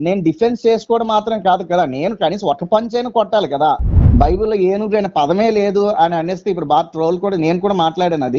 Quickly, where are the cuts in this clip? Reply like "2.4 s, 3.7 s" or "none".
4.0 s